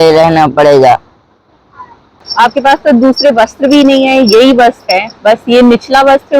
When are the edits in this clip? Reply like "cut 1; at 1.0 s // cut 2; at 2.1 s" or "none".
cut 1; at 2.2 s